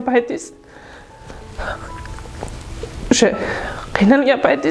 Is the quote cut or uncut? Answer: uncut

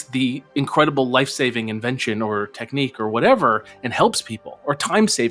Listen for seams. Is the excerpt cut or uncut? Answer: uncut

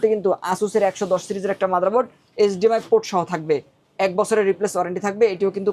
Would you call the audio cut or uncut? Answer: uncut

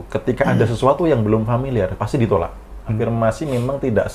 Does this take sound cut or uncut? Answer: cut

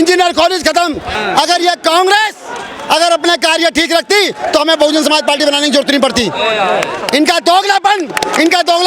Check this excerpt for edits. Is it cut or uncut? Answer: cut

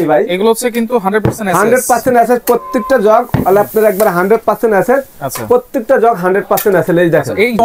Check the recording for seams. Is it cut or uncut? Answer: uncut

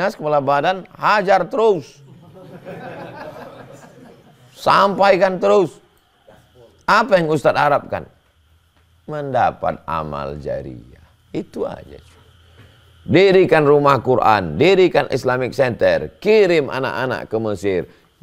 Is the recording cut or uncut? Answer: uncut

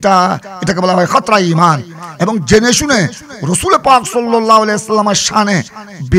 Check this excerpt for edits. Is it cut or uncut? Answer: uncut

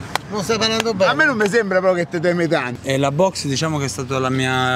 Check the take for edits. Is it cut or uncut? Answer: cut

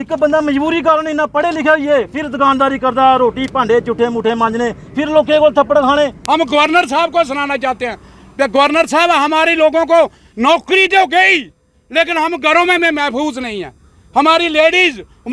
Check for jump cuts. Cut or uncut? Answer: cut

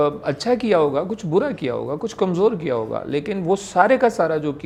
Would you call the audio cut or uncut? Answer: uncut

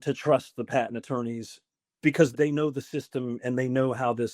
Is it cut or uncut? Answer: cut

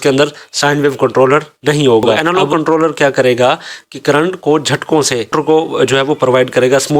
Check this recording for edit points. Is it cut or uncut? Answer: cut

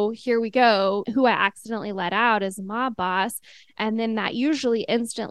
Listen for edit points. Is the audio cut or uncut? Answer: cut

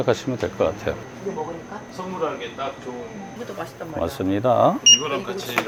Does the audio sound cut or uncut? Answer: uncut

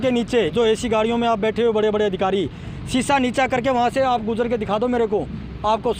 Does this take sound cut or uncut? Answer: uncut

